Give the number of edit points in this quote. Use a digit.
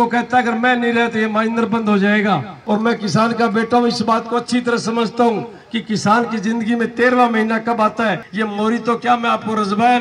2